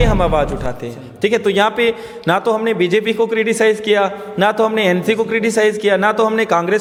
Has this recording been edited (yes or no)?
no